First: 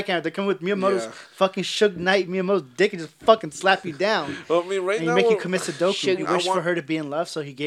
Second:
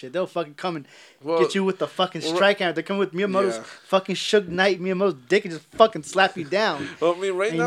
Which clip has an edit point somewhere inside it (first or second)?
first